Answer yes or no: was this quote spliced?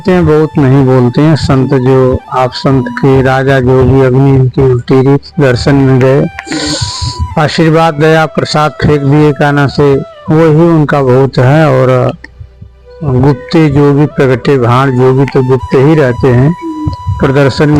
no